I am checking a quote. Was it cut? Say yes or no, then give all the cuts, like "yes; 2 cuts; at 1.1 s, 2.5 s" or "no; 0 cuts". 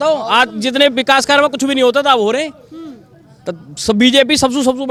no; 0 cuts